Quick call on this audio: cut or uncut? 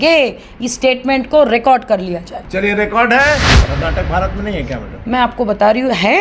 cut